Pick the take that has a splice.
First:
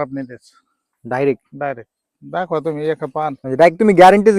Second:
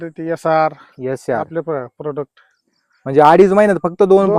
first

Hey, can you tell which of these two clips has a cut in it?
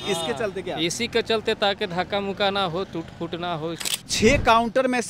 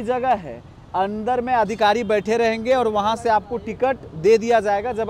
first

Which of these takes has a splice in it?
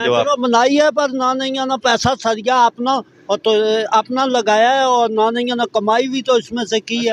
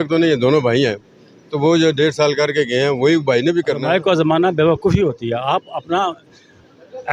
second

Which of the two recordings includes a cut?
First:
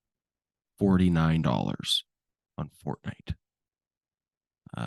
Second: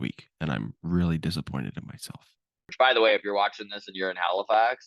second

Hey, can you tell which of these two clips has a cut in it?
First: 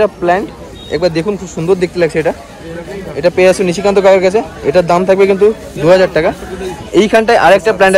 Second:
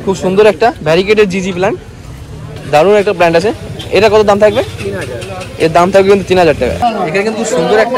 second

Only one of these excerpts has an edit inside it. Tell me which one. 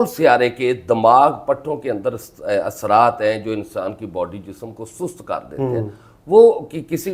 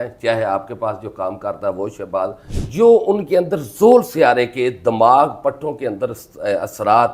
second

